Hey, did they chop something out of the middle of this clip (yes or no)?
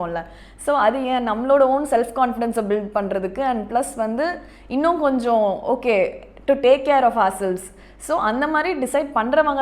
no